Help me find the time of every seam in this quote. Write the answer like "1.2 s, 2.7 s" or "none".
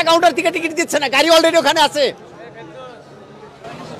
none